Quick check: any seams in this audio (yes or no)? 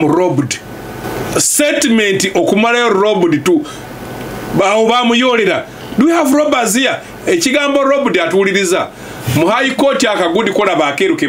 yes